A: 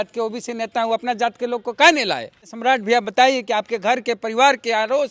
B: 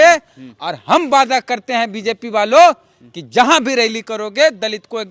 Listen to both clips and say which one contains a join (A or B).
A